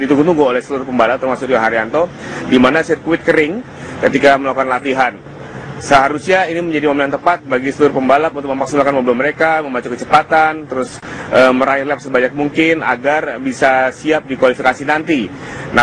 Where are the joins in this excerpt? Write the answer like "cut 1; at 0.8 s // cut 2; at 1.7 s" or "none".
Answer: none